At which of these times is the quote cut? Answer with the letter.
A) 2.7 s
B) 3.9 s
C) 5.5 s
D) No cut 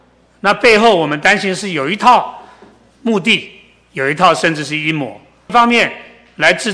C